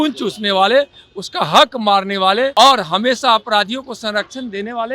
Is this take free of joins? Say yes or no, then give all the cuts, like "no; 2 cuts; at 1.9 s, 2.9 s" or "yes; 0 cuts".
no; 1 cut; at 2.5 s